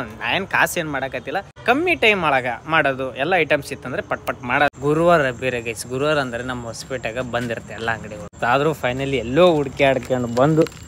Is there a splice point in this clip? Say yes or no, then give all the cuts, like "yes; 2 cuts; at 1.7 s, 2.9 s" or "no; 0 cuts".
yes; 3 cuts; at 1.5 s, 4.7 s, 8.3 s